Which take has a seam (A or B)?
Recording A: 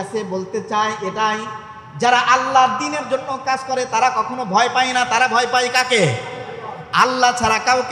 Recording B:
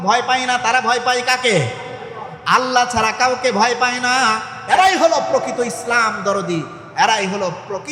B